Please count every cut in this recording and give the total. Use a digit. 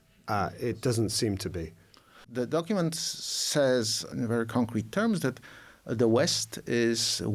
2